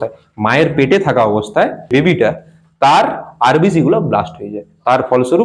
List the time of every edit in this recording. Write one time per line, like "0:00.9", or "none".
0:01.9